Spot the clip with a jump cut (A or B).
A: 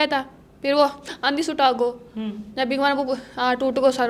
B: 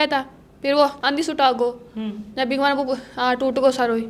B